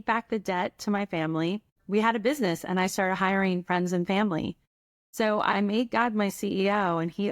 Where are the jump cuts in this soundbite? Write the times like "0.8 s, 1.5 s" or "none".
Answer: 1.8 s, 5.5 s